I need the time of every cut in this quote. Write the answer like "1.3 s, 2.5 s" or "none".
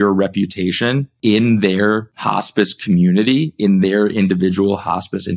1.1 s, 2.1 s